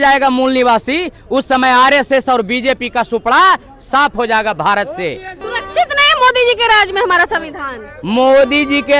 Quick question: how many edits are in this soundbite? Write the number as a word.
one